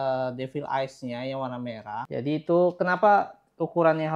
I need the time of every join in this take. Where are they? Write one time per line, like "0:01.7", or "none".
0:02.0